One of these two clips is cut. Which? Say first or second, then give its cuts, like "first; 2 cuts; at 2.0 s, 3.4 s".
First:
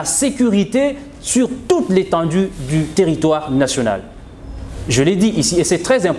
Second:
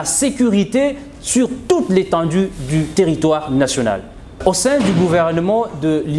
second; 1 cut; at 4.4 s